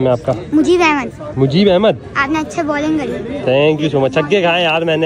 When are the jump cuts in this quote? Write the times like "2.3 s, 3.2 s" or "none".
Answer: none